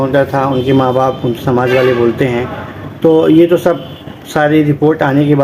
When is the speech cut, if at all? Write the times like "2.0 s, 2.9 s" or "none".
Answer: none